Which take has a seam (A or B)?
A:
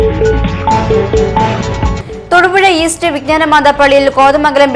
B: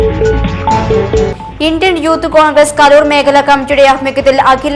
A